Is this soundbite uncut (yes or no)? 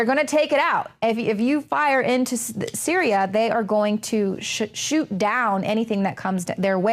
no